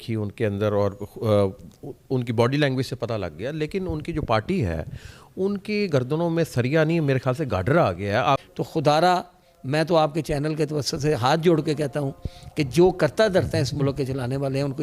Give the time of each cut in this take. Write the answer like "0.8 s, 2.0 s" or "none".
8.4 s